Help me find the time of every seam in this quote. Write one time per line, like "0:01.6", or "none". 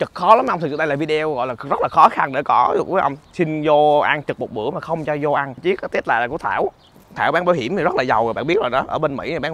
0:05.6